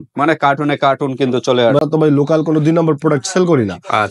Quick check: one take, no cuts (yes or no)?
no